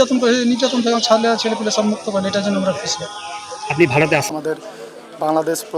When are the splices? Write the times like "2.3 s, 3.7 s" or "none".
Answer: 4.3 s